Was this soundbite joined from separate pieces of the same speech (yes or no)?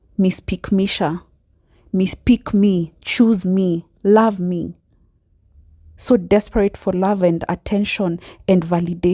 no